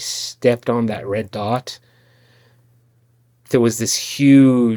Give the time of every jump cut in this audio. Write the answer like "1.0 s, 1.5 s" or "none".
none